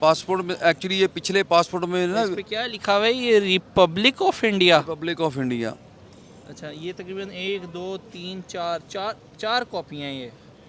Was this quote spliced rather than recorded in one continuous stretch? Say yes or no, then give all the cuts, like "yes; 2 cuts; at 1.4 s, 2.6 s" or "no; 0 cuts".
no; 0 cuts